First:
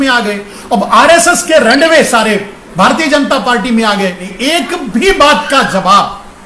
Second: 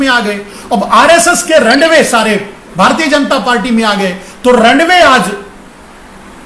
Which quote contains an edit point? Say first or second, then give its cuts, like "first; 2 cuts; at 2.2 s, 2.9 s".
first; 1 cut; at 4.3 s